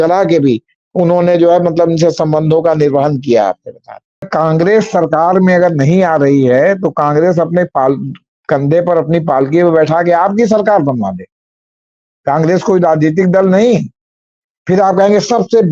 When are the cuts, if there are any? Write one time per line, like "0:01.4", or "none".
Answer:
0:04.3

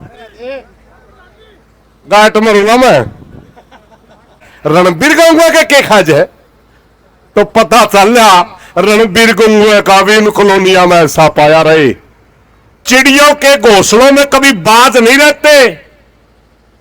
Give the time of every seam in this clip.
0:04.5
0:12.7

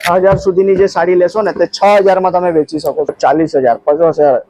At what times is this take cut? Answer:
0:03.1

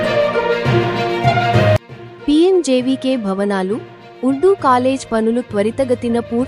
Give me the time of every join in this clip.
0:01.8

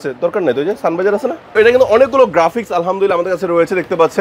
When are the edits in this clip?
0:01.6

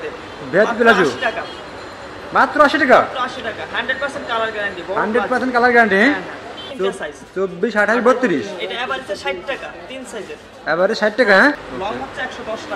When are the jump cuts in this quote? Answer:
0:06.6
0:11.6

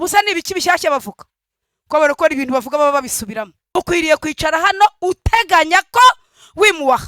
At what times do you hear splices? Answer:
0:03.6

